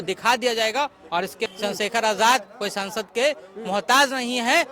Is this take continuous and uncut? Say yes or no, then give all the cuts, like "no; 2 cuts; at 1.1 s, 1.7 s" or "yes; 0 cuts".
no; 1 cut; at 1.5 s